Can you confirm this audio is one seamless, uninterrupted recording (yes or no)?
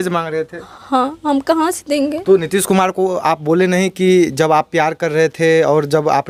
yes